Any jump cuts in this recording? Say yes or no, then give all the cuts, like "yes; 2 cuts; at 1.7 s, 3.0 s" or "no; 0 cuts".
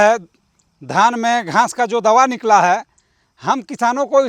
no; 0 cuts